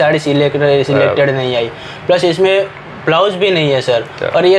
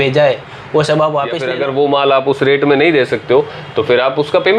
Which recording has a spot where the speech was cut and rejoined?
second; 1 cut; at 1.4 s

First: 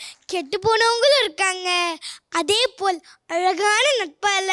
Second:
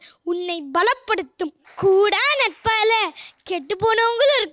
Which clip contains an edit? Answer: second; 1 cut; at 1.6 s

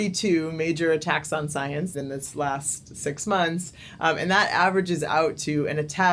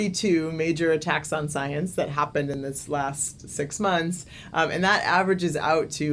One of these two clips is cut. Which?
first; 1 cut; at 1.9 s

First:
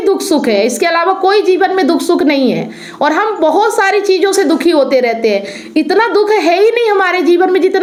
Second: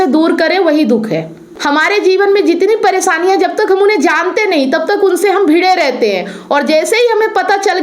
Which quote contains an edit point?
second; 1 cut; at 1.5 s

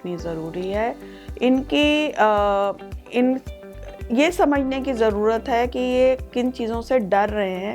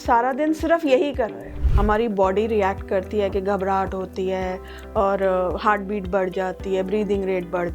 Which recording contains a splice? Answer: second; 1 cut; at 1.6 s

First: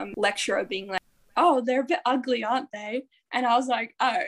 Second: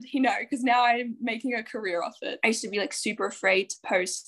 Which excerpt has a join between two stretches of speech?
second; 1 cut; at 2.4 s

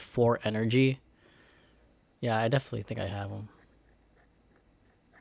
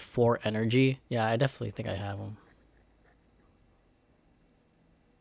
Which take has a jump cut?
second; 2 cuts; at 1.0 s, 3.4 s

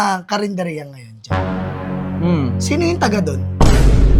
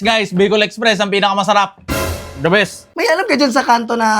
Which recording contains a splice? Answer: second; 1 cut; at 2.8 s

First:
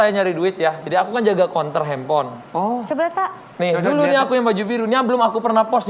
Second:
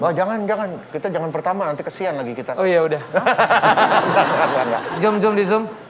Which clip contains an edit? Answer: second; 1 cut; at 5.0 s

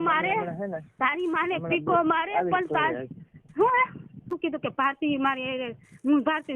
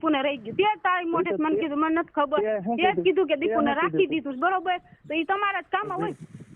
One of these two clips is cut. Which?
first; 1 cut; at 4.2 s

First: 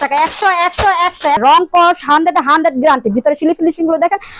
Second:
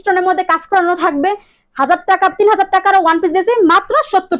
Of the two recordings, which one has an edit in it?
first; 1 cut; at 1.4 s

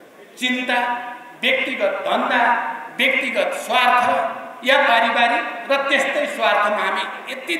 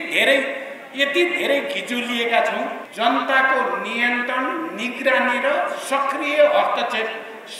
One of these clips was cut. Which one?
second; 1 cut; at 2.8 s

